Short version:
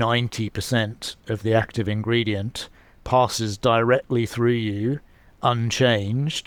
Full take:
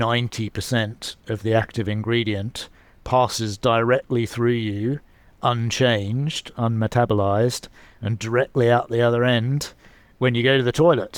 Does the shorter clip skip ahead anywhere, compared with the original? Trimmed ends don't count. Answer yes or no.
no